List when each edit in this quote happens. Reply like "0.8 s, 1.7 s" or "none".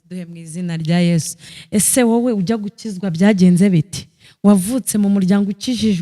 1.5 s